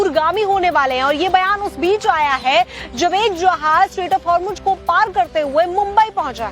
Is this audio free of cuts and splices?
no; 1 cut; at 4.0 s

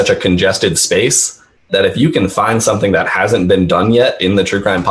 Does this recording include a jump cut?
no; 0 cuts

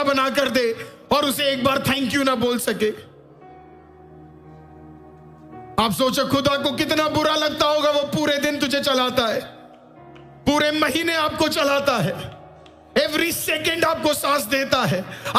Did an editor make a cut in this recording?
no; 0 cuts

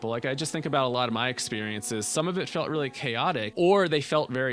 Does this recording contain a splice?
yes; 1 cut; at 3.5 s

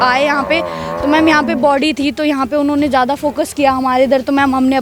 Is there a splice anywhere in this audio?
no; 0 cuts

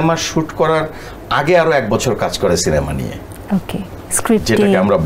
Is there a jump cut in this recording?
no; 0 cuts

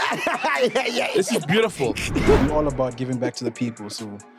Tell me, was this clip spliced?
yes; 1 cut; at 2.4 s

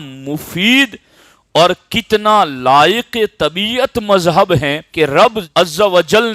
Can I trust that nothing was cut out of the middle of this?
no; 2 cuts; at 4.8 s, 5.4 s

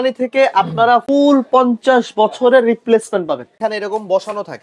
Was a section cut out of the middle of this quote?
yes; 2 cuts; at 1.0 s, 3.5 s

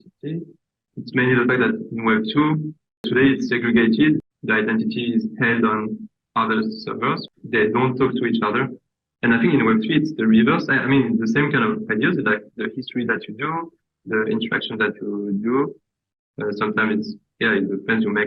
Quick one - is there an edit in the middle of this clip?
yes; 3 cuts; at 3.1 s, 4.3 s, 7.3 s

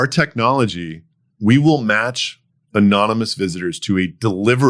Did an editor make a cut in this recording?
no; 0 cuts

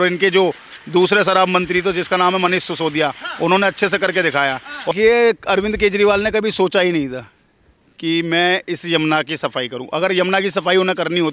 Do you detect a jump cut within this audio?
yes; 1 cut; at 4.9 s

